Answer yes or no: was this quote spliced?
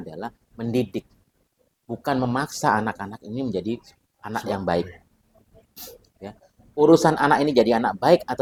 no